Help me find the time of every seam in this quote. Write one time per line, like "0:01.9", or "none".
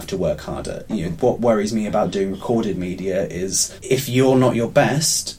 0:03.7